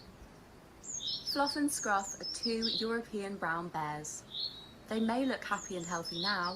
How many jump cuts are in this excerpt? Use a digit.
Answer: 1